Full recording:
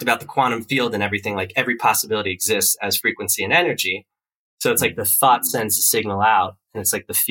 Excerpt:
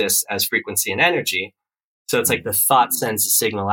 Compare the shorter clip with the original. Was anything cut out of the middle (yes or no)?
no